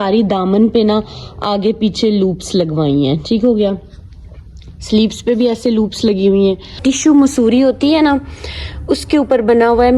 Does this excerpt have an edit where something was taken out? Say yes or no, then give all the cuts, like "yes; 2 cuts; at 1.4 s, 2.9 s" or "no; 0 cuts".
yes; 1 cut; at 6.8 s